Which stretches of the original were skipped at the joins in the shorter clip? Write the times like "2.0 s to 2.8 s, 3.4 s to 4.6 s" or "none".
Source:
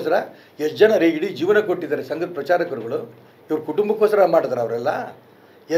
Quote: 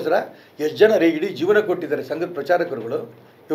none